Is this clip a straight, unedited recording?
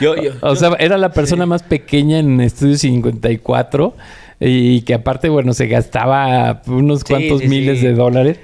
yes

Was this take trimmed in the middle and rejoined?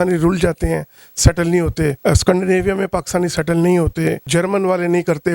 yes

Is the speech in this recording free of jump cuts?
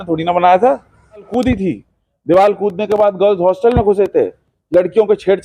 no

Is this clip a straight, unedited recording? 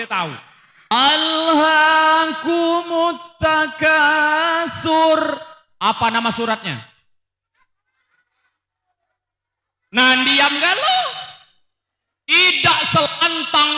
no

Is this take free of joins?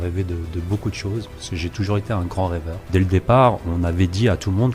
no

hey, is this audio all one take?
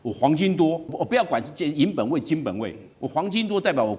no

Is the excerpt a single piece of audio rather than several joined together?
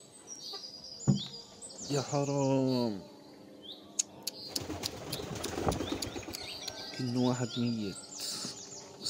yes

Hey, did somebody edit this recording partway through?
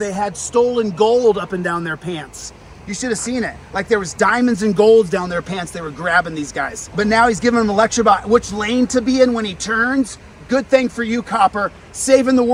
no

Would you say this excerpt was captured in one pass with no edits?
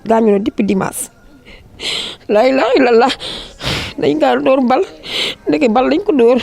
yes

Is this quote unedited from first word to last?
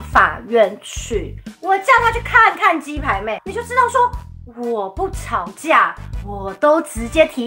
no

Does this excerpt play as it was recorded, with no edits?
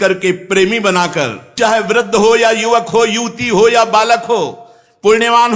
no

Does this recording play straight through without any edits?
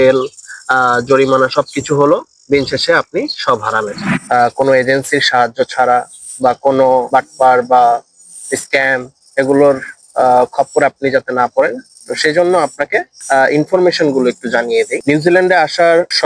no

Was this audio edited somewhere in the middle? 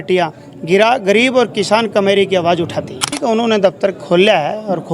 yes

